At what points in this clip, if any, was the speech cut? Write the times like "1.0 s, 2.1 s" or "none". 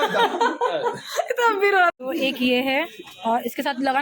1.9 s